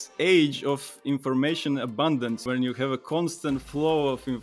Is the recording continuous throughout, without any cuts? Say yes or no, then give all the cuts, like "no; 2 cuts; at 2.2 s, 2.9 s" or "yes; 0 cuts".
no; 1 cut; at 2.4 s